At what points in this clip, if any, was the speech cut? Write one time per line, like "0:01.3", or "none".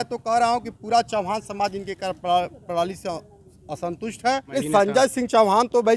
0:04.5